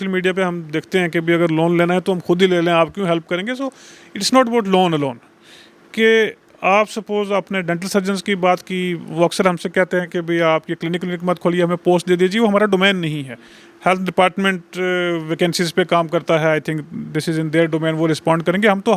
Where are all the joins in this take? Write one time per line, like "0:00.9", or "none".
none